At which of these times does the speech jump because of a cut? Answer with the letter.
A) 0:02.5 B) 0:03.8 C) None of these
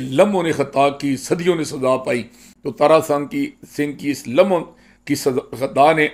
C